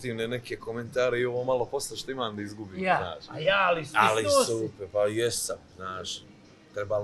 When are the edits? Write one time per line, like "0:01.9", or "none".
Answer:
none